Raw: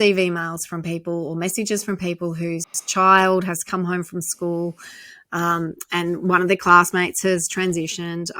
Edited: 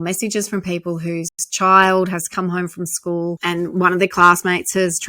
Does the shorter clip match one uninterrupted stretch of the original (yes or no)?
no